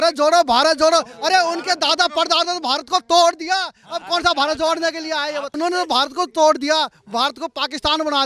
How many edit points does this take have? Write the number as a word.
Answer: one